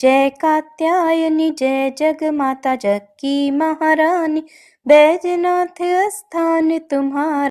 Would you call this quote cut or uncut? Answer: uncut